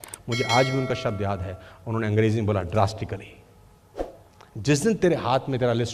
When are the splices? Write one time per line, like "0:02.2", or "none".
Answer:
none